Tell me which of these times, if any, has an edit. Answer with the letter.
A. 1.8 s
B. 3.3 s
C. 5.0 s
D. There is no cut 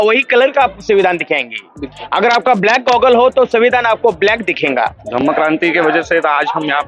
C